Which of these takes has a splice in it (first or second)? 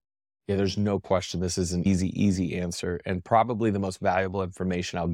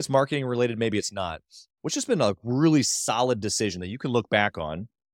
first